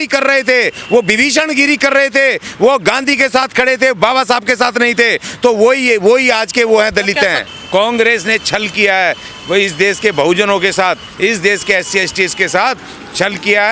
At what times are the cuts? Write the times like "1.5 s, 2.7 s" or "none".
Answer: 7.5 s